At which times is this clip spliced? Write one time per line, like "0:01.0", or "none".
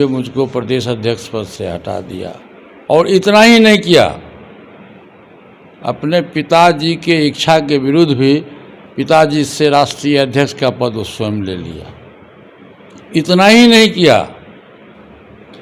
none